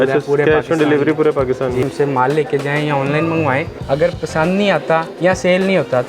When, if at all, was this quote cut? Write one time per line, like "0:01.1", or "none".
0:01.8
0:03.8
0:05.1